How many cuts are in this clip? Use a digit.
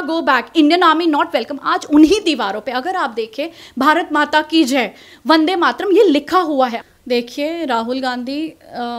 1